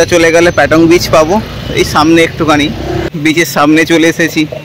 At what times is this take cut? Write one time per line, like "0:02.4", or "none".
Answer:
0:03.1

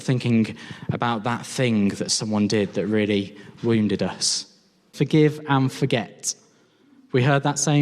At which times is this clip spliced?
0:04.8

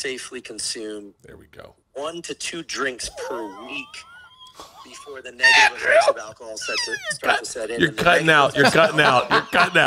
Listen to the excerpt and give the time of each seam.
none

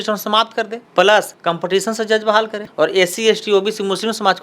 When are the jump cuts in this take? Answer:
0:01.3
0:02.6

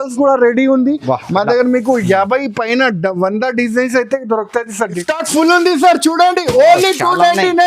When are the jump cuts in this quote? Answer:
0:05.0

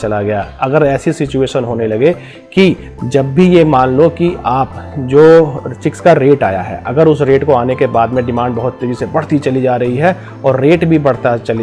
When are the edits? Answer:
none

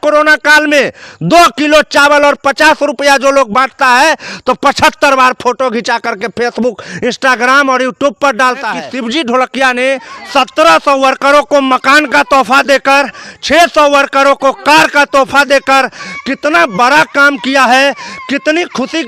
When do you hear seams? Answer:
0:08.8

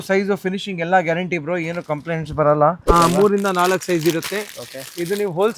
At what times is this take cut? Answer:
0:02.8

